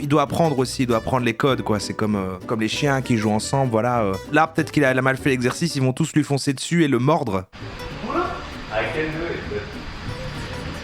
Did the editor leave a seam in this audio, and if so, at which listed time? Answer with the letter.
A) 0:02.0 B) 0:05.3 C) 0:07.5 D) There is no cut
C